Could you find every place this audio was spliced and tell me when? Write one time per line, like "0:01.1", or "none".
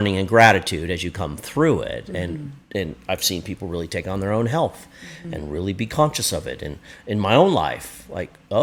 none